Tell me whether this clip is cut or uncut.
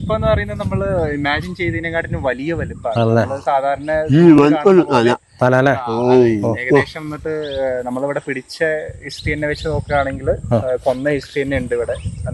uncut